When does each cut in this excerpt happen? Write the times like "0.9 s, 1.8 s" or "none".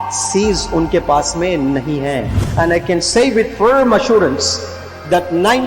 2.4 s

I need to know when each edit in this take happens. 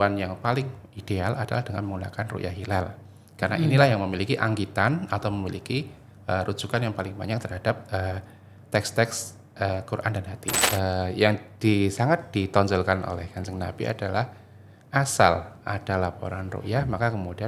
10.6 s

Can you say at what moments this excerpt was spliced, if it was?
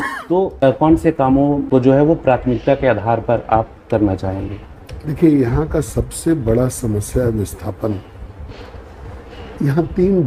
none

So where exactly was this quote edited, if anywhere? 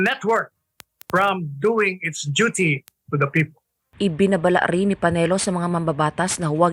none

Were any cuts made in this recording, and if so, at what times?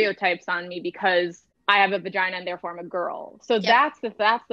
1.5 s

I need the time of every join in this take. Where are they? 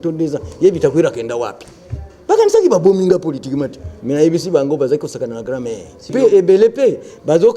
6.1 s

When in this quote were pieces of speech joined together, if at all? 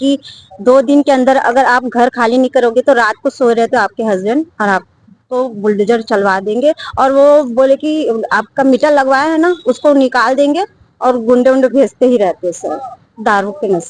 none

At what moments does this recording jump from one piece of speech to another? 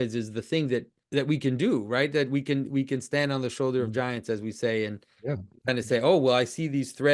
1.0 s

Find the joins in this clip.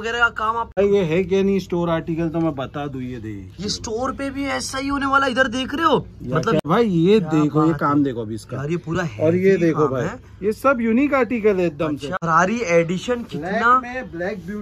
0.8 s, 6.6 s, 12.1 s

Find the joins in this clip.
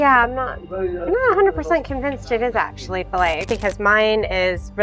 3.5 s

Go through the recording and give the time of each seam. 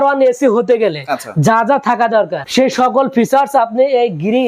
none

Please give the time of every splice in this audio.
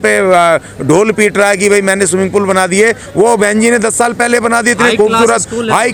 none

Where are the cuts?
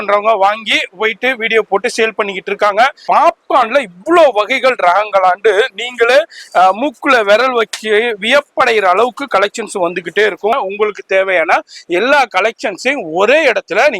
3.0 s, 10.5 s

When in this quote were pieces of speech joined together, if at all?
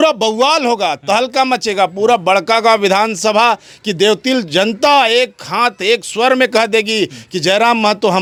none

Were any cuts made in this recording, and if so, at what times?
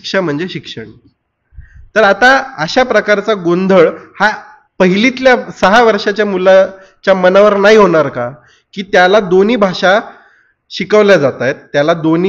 none

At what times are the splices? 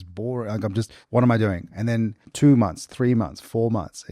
1.0 s, 2.2 s

